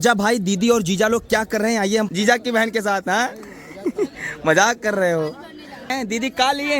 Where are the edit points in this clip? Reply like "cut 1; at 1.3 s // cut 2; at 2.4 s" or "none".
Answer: cut 1; at 2.1 s // cut 2; at 5.9 s